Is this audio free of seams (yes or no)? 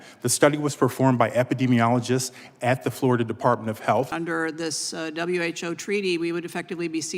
no